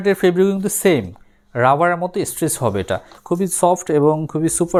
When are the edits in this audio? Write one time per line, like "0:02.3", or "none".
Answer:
none

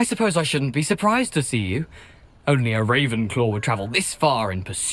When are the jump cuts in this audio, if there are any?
none

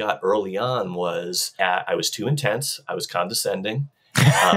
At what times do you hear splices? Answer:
0:01.5

